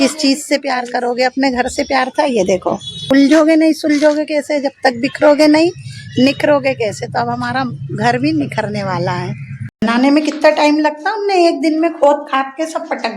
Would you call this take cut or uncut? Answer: cut